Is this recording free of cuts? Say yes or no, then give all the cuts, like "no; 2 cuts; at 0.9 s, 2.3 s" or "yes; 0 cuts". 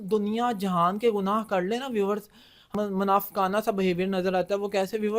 no; 1 cut; at 2.7 s